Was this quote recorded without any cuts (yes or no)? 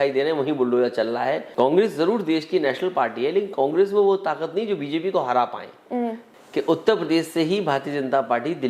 no